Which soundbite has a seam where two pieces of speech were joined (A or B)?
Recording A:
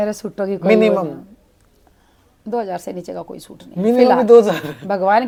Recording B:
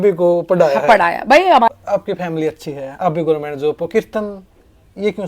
B